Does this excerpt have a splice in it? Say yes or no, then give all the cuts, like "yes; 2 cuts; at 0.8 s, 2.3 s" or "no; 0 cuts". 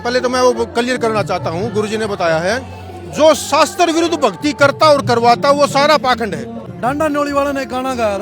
yes; 1 cut; at 6.6 s